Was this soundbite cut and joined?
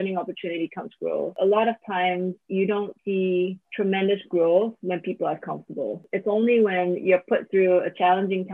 yes; 4 cuts; at 1.3 s, 2.4 s, 3.1 s, 6.1 s

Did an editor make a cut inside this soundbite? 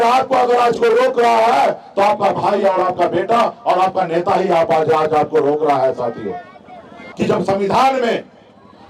yes; 1 cut; at 7.1 s

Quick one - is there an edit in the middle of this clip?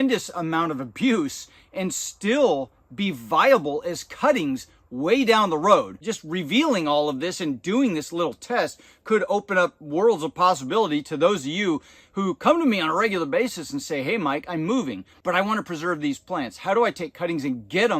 yes; 2 cuts; at 6.0 s, 15.1 s

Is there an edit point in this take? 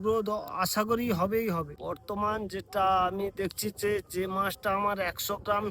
yes; 1 cut; at 1.7 s

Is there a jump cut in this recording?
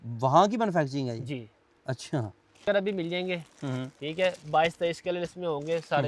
yes; 1 cut; at 2.6 s

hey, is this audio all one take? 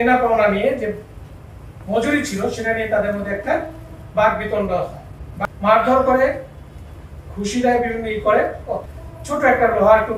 no; 2 cuts; at 5.2 s, 8.8 s

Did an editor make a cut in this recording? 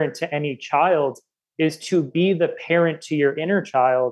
no; 0 cuts

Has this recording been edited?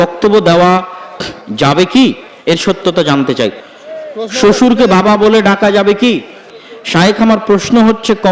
yes; 2 cuts; at 3.6 s, 6.5 s

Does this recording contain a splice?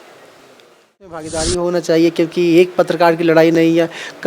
yes; 1 cut; at 1.1 s

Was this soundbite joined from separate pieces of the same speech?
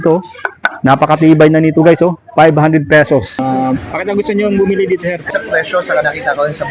yes; 2 cuts; at 3.4 s, 5.3 s

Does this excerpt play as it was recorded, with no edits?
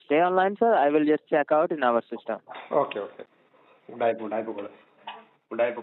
yes; 0 cuts

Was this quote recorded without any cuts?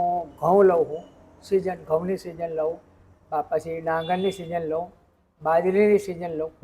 yes; 0 cuts

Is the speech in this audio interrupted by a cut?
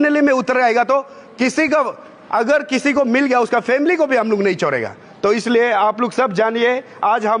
no; 0 cuts

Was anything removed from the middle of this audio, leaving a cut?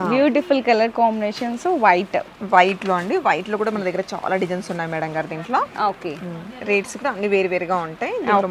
no; 0 cuts

